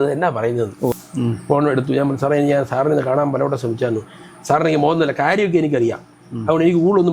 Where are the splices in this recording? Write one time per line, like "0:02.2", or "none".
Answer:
0:00.9